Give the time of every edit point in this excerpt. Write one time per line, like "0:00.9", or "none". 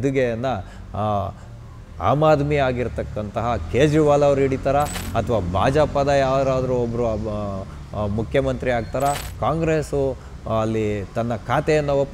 none